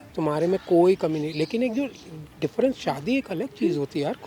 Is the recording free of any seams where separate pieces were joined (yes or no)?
yes